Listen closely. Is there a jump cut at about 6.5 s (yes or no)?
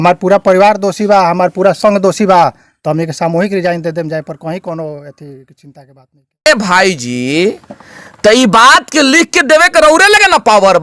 yes